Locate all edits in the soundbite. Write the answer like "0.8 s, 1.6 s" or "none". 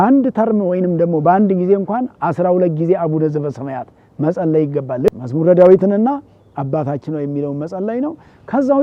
5.1 s

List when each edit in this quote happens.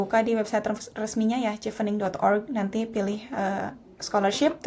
none

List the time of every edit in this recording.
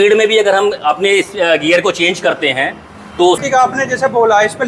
3.4 s

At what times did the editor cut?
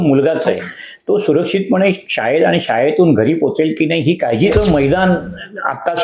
4.5 s

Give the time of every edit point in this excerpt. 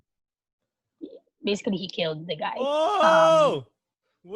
3.0 s

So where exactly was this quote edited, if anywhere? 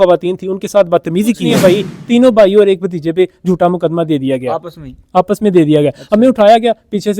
1.4 s

